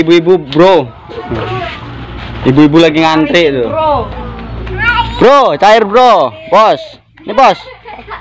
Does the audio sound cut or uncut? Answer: uncut